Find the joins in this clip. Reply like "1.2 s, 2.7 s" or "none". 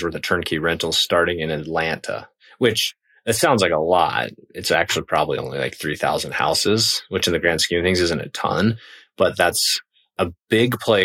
10.1 s